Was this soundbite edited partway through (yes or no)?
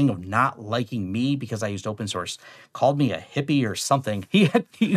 no